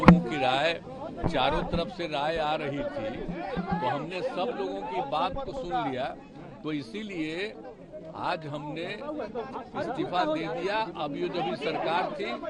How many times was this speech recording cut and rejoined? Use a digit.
0